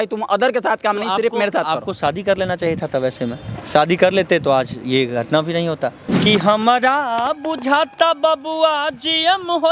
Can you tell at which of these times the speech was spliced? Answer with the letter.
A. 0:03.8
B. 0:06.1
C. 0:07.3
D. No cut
B